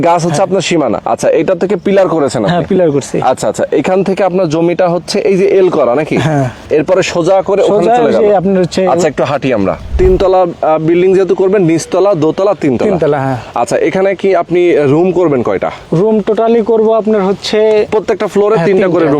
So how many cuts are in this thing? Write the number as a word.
five